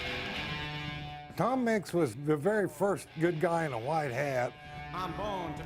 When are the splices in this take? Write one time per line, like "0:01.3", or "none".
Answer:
0:01.2
0:02.2
0:04.7